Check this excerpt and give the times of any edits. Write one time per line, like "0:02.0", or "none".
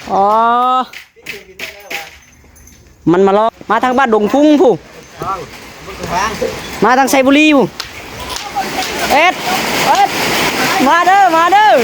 0:03.5